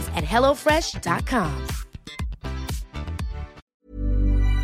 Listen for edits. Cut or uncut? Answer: cut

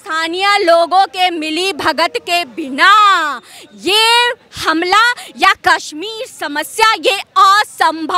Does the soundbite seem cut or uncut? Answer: uncut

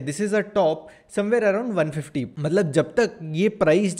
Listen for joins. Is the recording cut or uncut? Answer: cut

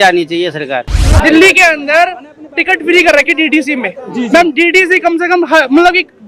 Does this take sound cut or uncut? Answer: cut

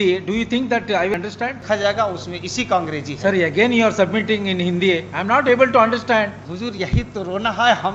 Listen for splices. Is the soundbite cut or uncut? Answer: cut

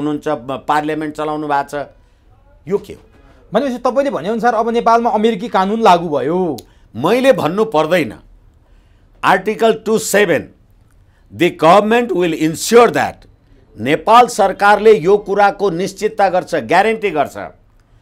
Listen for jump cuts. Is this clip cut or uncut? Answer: uncut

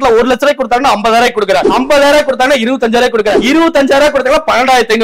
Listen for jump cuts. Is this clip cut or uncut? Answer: uncut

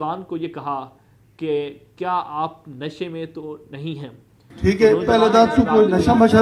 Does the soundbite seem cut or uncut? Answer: uncut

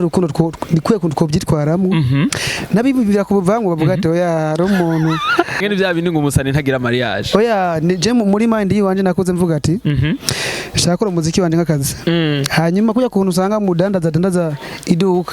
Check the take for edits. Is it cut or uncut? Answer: cut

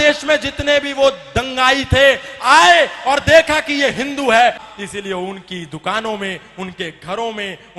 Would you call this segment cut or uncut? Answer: cut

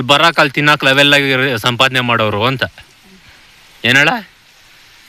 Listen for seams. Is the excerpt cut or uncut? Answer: uncut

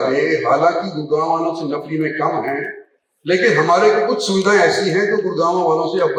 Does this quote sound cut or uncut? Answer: uncut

